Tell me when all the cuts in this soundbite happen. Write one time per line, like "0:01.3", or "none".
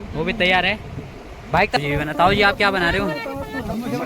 0:01.8